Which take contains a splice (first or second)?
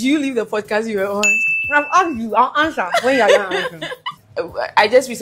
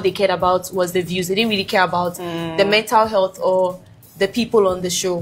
first